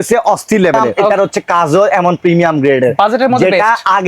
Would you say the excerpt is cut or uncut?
cut